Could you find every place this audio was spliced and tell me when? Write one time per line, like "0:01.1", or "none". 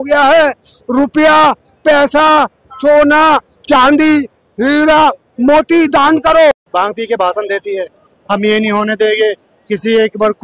0:06.6